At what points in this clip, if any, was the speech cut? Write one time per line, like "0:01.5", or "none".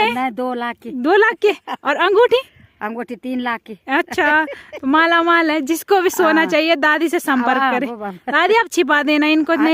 none